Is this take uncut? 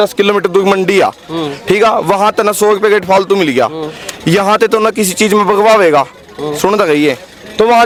yes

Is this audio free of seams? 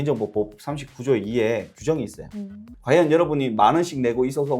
no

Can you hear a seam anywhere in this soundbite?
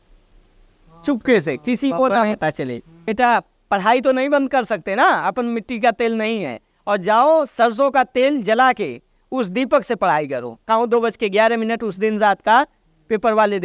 yes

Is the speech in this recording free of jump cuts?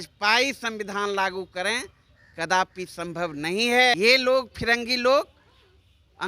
no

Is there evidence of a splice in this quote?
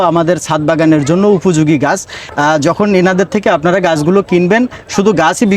yes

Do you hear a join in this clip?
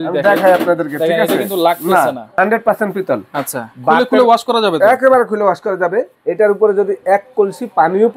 yes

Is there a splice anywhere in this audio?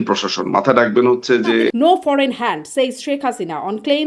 yes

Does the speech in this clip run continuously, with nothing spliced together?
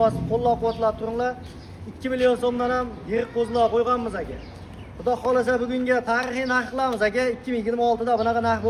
yes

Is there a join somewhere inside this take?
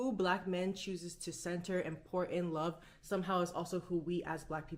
no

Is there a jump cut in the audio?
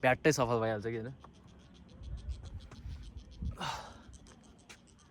no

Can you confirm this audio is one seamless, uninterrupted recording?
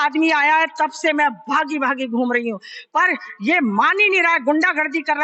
yes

